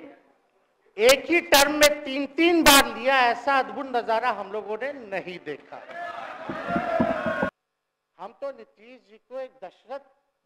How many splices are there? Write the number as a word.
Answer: one